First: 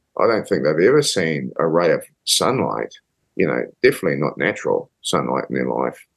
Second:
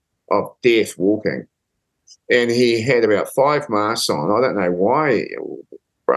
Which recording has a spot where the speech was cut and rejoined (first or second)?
first